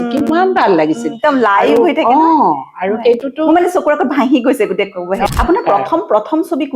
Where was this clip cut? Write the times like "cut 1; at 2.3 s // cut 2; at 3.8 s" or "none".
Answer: cut 1; at 5.3 s